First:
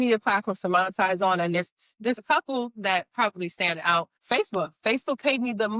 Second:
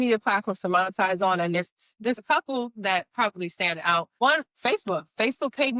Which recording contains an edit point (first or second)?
first